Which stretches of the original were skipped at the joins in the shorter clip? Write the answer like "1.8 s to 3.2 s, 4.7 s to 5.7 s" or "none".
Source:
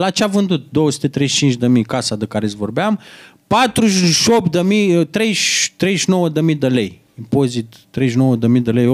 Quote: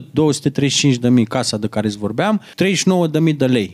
3.1 s to 5.7 s